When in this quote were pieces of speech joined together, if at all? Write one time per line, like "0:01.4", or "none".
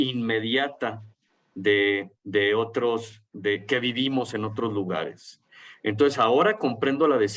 none